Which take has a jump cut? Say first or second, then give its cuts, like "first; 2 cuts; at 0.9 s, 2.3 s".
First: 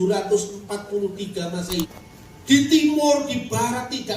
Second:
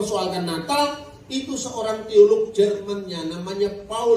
first; 1 cut; at 2.0 s